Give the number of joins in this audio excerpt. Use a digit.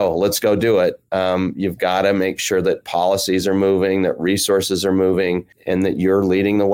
1